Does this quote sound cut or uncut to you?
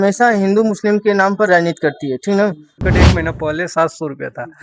cut